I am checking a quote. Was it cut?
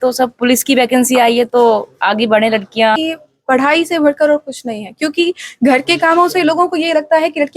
yes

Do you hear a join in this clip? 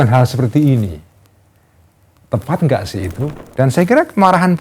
yes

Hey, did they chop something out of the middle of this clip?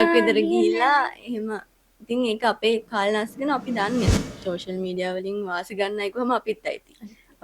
yes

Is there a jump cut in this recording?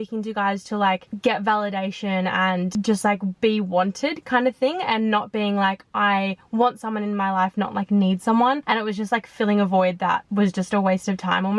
no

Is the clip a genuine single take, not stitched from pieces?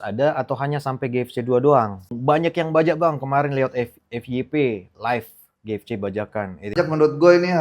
no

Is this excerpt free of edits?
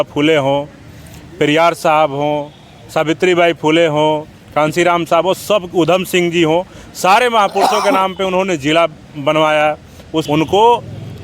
no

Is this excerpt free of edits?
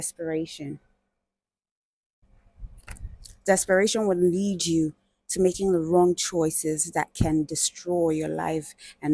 yes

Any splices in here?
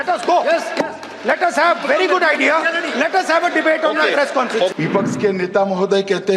yes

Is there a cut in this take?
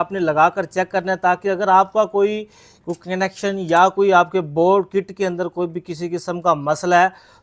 no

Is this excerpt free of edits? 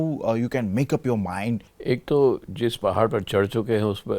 no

